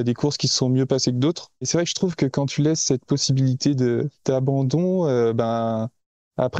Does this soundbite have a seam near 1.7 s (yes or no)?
yes